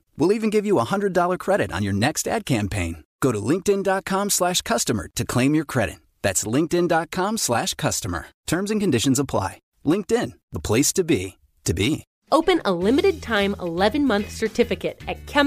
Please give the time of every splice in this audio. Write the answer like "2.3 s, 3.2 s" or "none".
12.1 s